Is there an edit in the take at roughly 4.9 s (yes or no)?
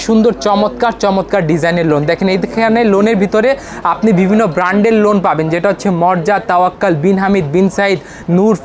no